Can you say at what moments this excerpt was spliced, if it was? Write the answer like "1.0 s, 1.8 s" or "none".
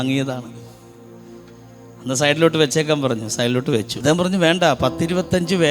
3.9 s